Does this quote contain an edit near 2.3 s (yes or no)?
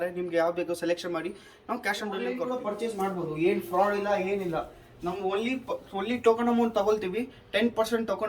yes